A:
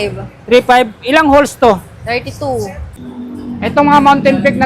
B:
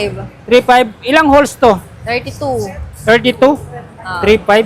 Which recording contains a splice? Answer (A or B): A